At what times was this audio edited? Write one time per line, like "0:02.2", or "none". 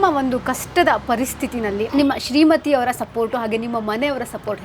0:01.9